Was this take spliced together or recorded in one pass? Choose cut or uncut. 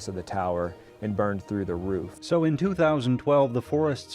cut